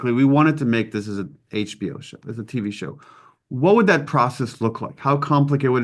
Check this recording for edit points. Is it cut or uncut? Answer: uncut